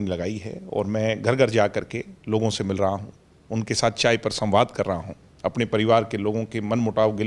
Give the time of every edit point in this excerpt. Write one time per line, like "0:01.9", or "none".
none